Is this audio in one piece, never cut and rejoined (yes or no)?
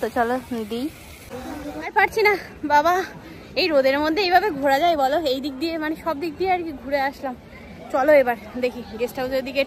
no